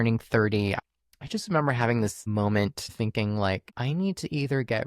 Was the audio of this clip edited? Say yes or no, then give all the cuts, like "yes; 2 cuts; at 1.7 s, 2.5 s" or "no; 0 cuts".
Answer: yes; 3 cuts; at 0.8 s, 2.9 s, 3.7 s